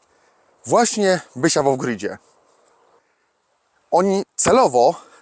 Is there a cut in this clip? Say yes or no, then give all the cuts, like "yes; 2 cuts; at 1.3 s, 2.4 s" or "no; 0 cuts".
yes; 1 cut; at 3.0 s